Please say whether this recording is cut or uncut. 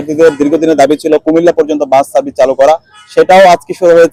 uncut